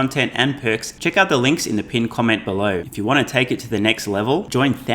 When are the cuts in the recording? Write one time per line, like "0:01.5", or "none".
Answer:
0:00.9
0:02.9